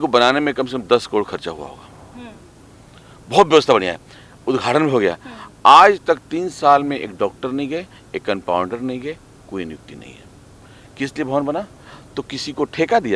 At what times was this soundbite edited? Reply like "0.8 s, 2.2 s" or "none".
none

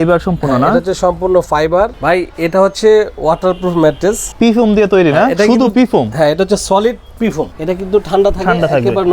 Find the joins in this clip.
2.0 s, 4.3 s, 7.5 s

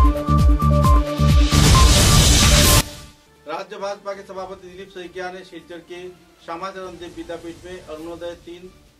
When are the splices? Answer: 3.0 s

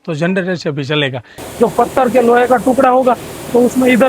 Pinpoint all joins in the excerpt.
1.4 s

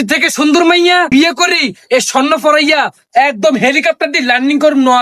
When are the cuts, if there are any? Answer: 1.1 s

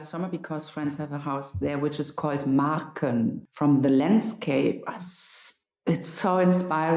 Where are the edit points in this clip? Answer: 3.4 s

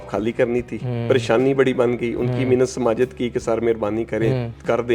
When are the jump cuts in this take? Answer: none

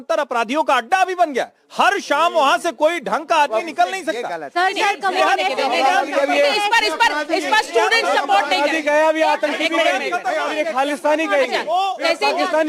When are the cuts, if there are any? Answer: none

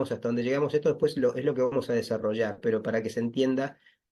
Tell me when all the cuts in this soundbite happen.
none

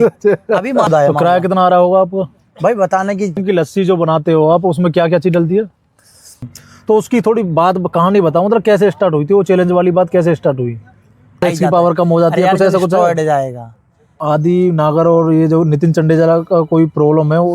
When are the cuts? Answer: 0.9 s, 3.4 s, 6.5 s, 11.4 s, 14.1 s

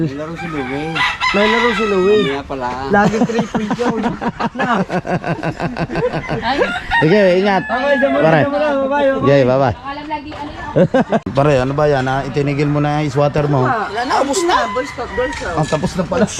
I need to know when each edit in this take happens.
11.3 s

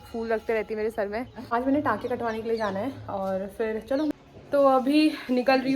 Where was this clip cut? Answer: 1.4 s, 4.1 s

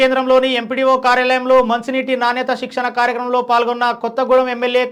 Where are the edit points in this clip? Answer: none

